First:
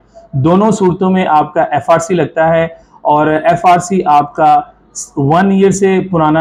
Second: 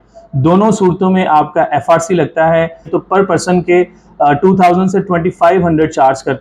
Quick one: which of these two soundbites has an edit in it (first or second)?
second